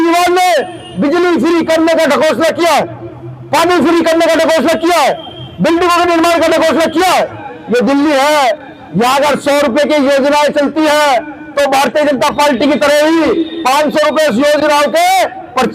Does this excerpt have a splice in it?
yes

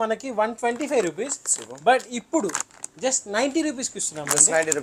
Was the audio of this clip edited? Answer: no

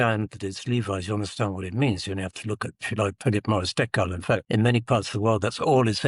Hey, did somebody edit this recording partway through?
yes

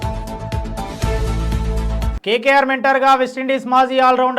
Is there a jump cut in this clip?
yes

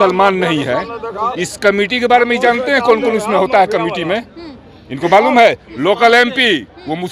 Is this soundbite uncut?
yes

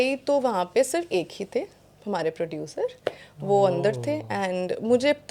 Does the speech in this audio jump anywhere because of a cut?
no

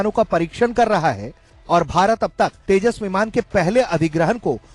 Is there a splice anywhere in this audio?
no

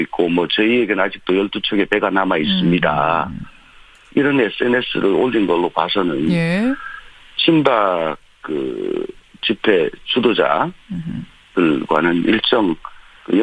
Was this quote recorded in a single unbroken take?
yes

